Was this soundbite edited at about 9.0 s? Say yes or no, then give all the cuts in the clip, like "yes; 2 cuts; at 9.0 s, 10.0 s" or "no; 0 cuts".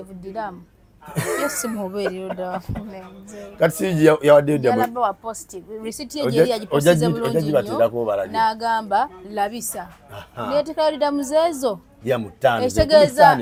no; 0 cuts